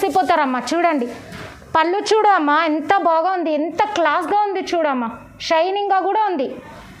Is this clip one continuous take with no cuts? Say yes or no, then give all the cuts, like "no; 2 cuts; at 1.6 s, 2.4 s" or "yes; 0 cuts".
yes; 0 cuts